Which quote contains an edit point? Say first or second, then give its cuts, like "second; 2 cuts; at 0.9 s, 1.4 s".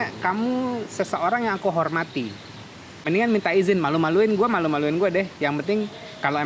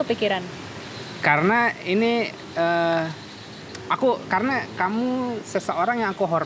first; 1 cut; at 2.9 s